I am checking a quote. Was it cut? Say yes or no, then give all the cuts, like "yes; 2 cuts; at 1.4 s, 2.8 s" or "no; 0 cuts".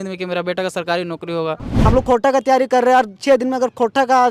yes; 1 cut; at 1.7 s